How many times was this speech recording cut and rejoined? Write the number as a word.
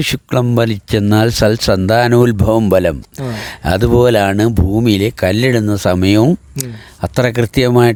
zero